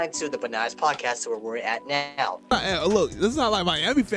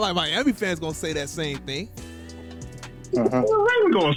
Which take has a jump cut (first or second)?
first